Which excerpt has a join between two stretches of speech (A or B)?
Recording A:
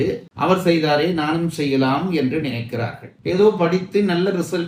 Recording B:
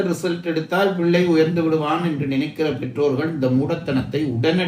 A